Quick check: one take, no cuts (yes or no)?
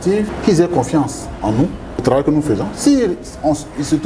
yes